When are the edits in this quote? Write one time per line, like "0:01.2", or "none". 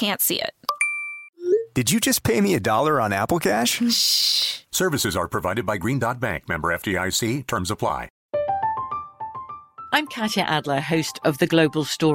0:08.1